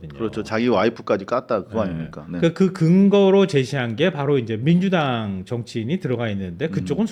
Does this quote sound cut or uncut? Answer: uncut